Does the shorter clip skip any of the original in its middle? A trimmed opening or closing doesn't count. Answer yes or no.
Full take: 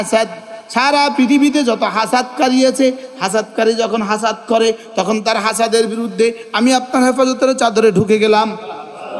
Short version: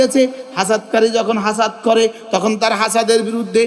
no